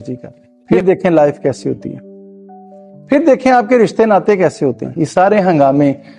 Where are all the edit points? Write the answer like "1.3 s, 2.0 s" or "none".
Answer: 0.7 s, 4.9 s